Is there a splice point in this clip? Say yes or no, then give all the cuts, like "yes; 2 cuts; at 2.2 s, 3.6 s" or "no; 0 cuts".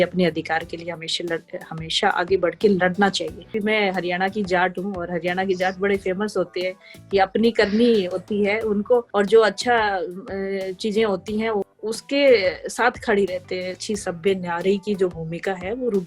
yes; 4 cuts; at 3.6 s, 9.1 s, 11.7 s, 13.8 s